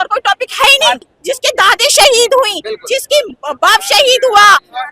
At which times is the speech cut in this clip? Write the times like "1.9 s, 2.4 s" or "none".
1.1 s